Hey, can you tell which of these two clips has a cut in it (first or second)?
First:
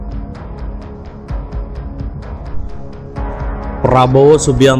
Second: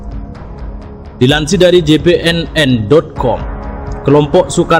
second